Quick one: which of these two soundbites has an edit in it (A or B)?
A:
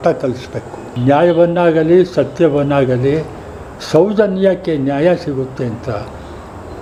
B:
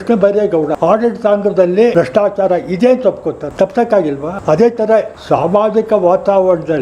B